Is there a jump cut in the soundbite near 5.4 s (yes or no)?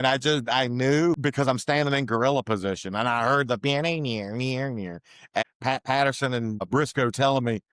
yes